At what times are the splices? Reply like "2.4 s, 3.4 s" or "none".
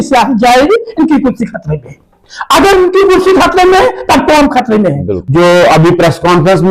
5.1 s